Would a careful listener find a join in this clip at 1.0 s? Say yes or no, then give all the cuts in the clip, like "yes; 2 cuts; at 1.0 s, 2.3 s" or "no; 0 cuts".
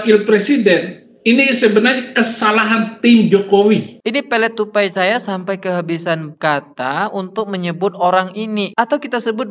no; 1 cut; at 3.9 s